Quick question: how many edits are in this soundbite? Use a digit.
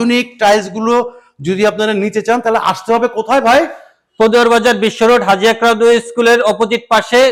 0